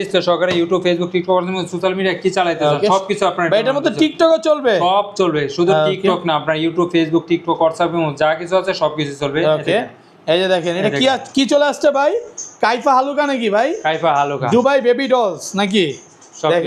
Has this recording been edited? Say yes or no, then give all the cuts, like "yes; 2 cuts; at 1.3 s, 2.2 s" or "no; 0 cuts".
no; 0 cuts